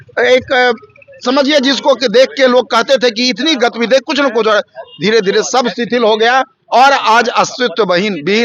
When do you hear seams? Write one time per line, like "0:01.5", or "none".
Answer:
none